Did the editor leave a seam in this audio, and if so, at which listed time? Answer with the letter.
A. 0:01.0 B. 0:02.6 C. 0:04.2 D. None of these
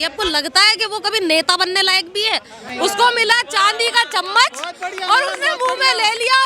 B